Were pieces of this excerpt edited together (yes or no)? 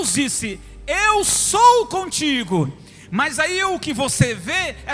no